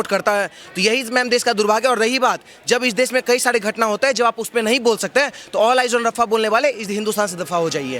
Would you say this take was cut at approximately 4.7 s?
no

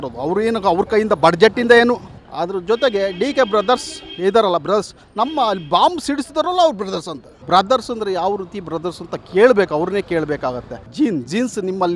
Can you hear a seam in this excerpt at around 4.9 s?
no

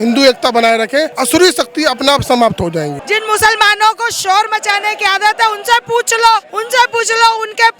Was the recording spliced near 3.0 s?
yes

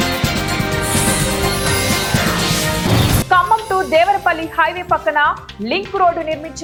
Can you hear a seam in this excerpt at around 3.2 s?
no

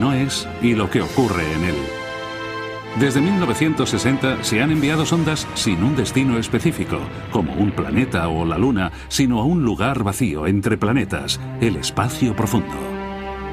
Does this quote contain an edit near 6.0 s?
no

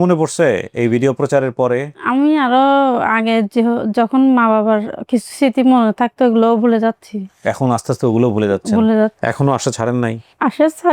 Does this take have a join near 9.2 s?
yes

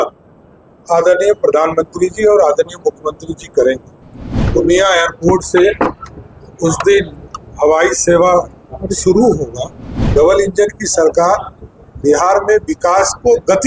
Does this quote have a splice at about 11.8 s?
no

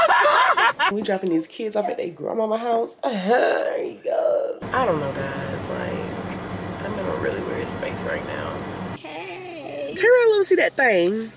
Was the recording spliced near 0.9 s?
yes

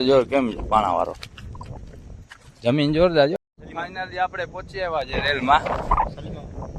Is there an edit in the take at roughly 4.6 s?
no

